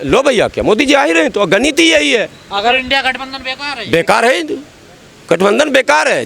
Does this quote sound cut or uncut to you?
uncut